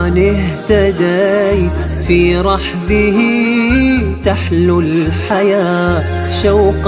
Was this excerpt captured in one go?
yes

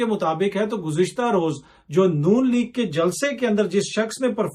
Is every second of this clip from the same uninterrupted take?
yes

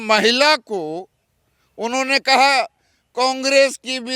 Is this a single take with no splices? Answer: yes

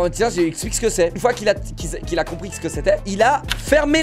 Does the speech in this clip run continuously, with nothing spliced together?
no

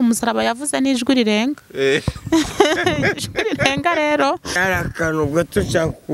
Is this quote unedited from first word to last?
no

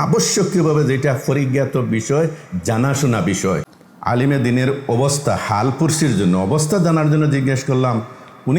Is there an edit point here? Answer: yes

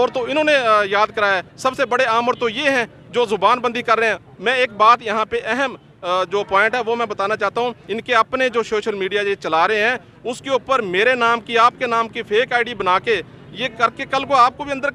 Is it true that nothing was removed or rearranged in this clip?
yes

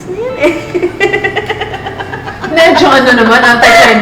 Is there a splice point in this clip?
no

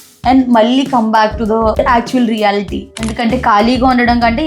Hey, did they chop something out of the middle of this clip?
yes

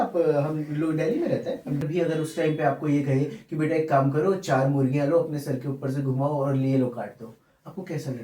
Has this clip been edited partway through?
yes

